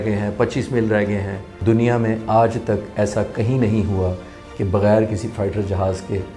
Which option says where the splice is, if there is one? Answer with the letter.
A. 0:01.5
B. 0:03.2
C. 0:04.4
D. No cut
A